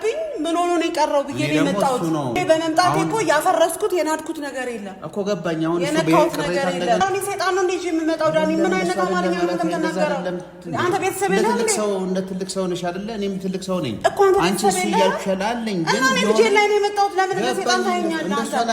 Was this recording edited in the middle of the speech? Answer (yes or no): yes